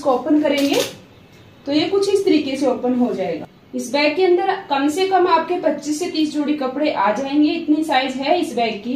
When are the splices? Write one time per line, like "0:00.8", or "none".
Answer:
none